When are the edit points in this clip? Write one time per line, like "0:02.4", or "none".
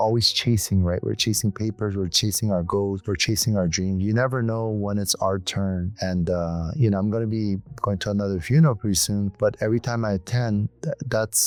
none